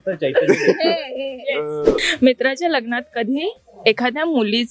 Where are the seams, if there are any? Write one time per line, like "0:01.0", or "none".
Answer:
0:02.0